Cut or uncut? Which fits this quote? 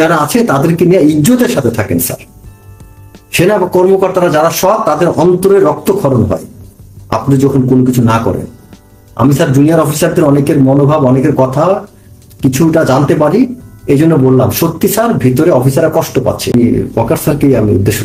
cut